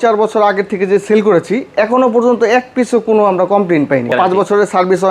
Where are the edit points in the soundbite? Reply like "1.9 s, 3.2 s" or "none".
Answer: 4.1 s